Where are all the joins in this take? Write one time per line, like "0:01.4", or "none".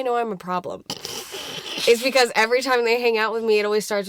none